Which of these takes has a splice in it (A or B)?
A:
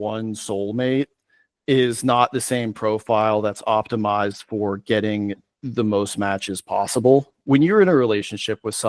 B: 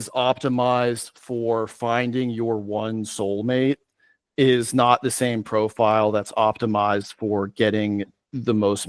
A